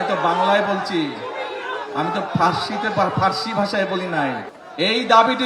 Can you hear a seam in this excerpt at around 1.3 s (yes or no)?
no